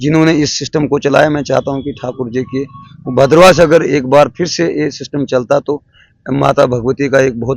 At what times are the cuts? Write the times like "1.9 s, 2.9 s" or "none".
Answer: none